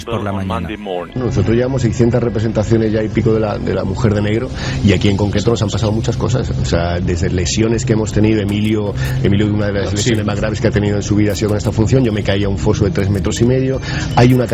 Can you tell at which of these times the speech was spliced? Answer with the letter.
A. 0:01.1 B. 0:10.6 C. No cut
A